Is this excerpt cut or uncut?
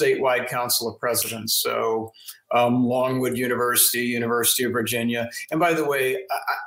uncut